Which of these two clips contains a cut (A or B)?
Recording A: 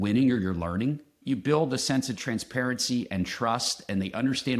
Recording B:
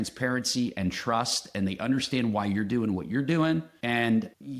A